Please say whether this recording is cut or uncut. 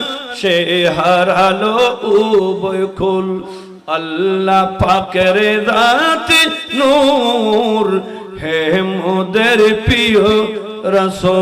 uncut